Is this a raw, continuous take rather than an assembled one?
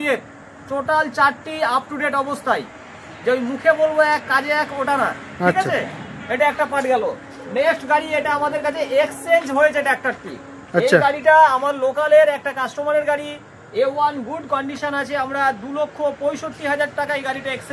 yes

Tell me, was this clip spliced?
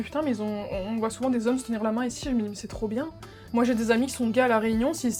no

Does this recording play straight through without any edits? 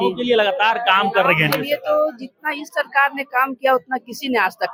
yes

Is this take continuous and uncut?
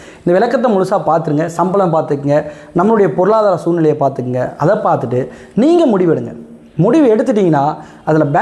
yes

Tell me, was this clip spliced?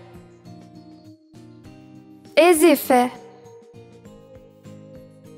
no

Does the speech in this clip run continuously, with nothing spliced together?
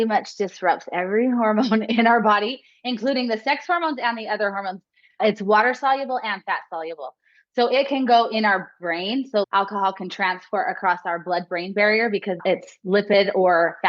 no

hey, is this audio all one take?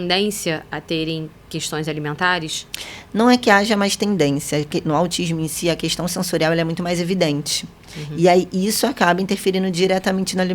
yes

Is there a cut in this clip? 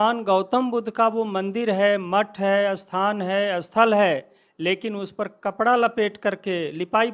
no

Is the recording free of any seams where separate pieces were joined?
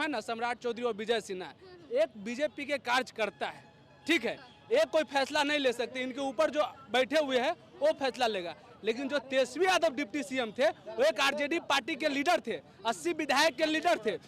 yes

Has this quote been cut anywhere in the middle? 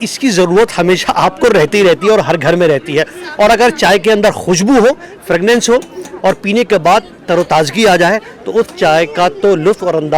no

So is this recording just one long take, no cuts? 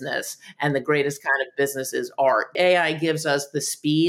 no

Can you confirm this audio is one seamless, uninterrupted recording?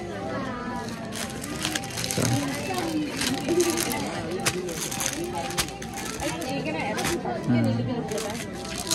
yes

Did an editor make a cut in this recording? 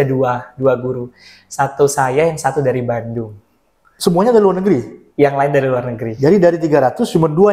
no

